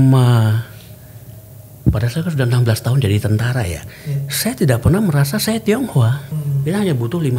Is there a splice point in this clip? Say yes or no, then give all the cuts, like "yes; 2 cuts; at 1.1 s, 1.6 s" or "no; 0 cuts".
yes; 1 cut; at 6.3 s